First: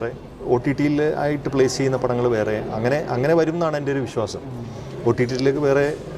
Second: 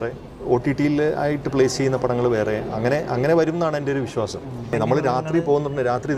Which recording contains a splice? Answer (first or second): second